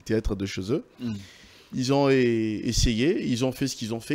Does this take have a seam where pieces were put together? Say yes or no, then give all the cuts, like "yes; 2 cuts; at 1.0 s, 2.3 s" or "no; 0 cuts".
no; 0 cuts